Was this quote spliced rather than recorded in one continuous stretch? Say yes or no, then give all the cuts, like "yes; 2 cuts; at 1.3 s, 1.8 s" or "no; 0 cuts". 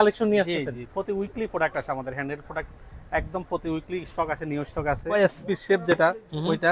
yes; 1 cut; at 5.1 s